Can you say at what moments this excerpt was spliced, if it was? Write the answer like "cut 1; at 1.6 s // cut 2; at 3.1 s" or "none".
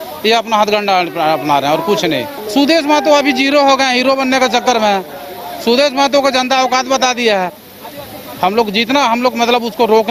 cut 1; at 2.4 s // cut 2; at 7.6 s